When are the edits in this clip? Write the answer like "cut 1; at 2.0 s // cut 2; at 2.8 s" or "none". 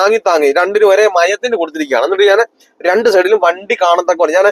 none